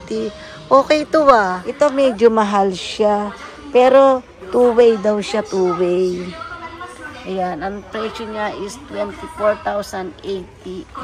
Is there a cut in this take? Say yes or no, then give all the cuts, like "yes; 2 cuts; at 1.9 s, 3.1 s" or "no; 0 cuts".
yes; 1 cut; at 1.6 s